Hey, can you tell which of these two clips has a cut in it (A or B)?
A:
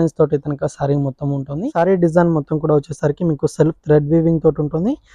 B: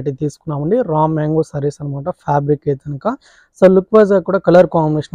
A